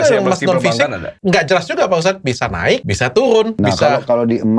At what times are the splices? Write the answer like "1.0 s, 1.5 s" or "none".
1.1 s, 2.9 s, 3.5 s

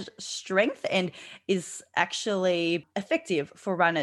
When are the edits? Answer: 2.9 s

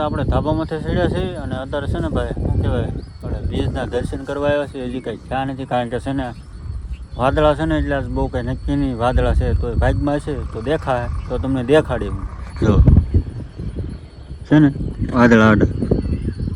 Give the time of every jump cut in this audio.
none

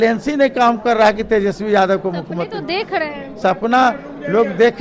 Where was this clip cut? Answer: 3.4 s

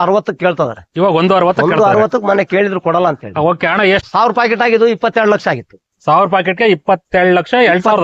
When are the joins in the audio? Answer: 4.1 s

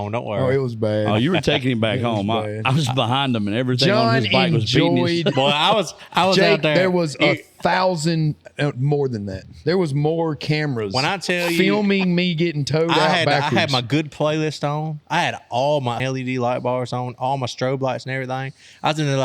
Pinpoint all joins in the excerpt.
16.0 s

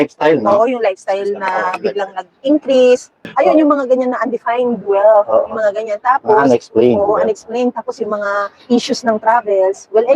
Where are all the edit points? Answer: 3.2 s

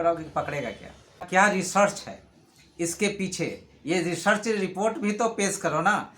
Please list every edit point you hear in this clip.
1.3 s

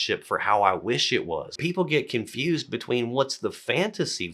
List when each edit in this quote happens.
1.5 s

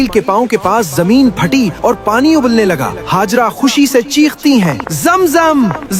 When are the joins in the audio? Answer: none

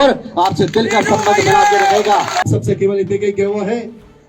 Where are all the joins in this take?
2.4 s

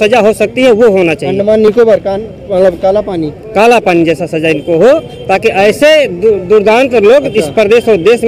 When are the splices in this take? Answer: none

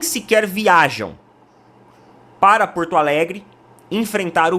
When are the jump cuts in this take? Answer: none

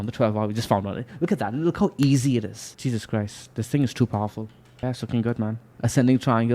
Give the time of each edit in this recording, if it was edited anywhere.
2.6 s, 5.7 s

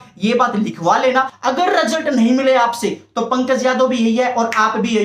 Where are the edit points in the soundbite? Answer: 1.3 s

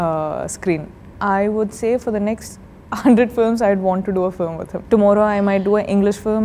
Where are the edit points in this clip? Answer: 1.1 s, 4.7 s

